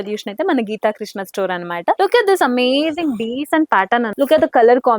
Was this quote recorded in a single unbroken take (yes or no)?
yes